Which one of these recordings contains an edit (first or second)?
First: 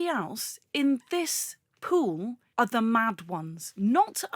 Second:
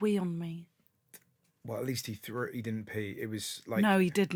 first